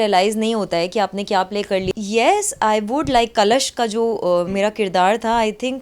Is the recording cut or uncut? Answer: cut